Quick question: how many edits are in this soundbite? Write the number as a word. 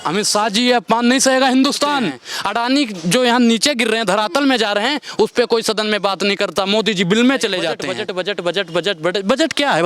two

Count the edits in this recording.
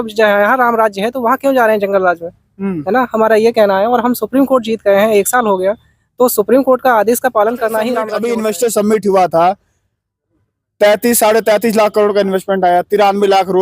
one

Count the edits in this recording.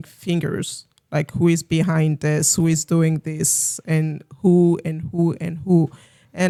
zero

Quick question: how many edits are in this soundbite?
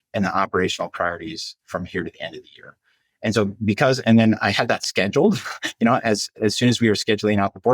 zero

